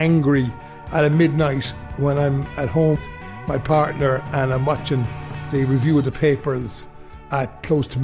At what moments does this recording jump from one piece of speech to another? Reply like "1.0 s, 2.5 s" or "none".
3.0 s